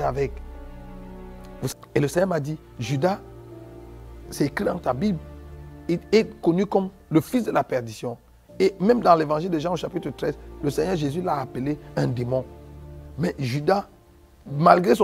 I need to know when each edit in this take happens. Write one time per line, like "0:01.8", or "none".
0:01.7